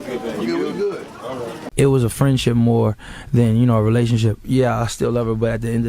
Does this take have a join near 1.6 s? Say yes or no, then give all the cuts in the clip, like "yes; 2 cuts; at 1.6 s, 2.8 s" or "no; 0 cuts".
yes; 1 cut; at 1.6 s